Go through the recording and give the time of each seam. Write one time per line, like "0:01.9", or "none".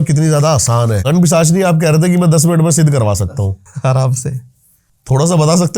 0:01.0